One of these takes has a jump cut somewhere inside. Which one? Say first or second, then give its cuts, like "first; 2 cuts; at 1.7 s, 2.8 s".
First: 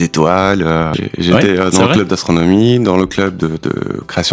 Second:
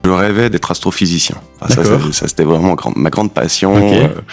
first; 1 cut; at 1.0 s